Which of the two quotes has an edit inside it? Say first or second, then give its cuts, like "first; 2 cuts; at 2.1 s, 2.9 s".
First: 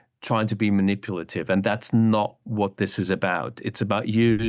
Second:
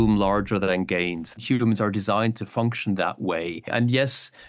second; 2 cuts; at 1.4 s, 3.7 s